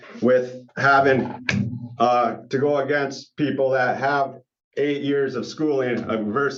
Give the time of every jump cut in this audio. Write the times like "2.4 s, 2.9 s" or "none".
none